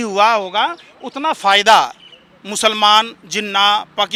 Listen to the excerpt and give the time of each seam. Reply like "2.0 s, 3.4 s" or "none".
none